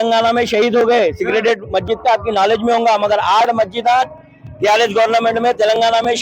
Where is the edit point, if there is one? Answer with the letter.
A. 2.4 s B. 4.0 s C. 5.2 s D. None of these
D